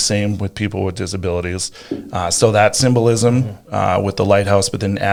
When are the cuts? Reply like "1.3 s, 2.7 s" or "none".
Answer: none